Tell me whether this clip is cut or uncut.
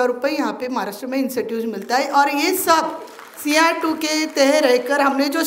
uncut